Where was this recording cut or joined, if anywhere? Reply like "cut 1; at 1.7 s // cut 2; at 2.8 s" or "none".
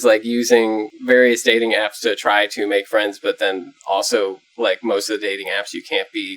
cut 1; at 0.9 s

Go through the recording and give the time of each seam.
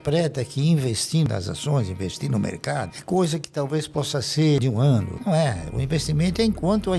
cut 1; at 1.3 s // cut 2; at 4.9 s

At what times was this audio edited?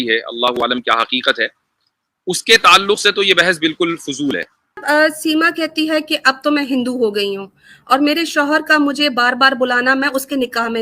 cut 1; at 4.8 s

